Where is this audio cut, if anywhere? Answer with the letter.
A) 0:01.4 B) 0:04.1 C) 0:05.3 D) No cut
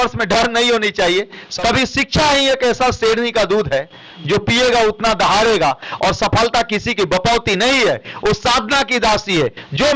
A